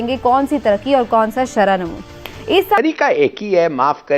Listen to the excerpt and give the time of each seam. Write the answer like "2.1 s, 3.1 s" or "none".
2.8 s